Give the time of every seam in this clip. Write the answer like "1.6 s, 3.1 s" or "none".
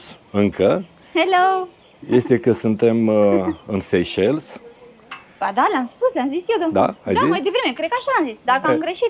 none